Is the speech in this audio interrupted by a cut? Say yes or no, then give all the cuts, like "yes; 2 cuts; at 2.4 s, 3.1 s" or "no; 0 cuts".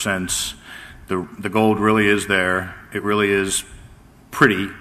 yes; 1 cut; at 3.9 s